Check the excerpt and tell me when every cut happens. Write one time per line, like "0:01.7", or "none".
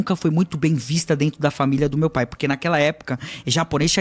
none